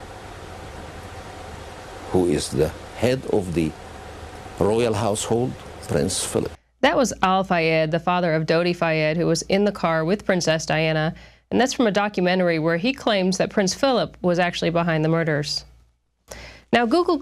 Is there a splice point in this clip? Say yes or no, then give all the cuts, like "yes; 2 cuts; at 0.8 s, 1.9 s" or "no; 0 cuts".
no; 0 cuts